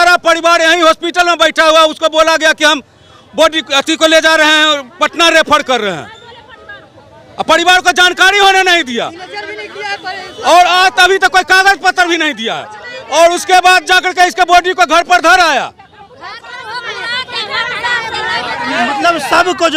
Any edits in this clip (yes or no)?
no